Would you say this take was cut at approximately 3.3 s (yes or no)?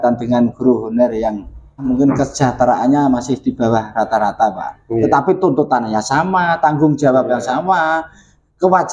no